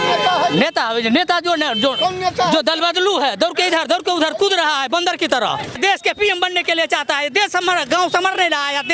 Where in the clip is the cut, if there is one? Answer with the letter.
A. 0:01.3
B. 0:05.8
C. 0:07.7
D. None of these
B